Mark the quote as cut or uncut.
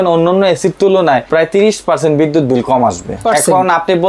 cut